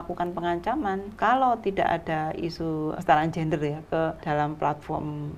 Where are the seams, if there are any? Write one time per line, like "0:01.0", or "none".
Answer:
0:01.1
0:03.0
0:04.2